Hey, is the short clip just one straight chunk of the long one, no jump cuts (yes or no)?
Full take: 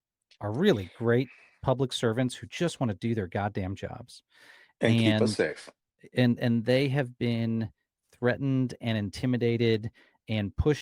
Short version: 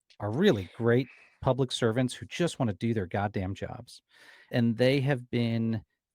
no